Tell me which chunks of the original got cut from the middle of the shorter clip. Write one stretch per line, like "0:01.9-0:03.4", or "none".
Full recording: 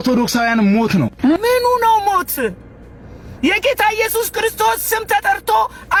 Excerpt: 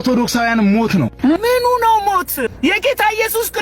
0:02.5-0:03.3